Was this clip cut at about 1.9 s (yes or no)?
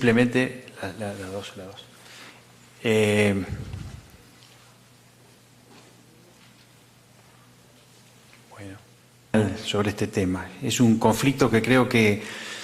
no